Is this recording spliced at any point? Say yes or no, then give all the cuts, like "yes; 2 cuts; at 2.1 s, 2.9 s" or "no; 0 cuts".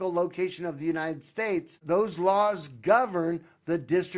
yes; 1 cut; at 1.8 s